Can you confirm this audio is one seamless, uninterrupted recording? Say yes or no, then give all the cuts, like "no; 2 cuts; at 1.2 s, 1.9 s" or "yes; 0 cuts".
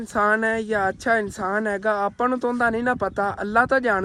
yes; 0 cuts